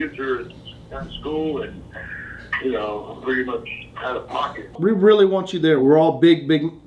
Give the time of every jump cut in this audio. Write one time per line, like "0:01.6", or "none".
0:04.8